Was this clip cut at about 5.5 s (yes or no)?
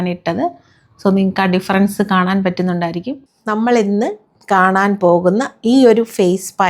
no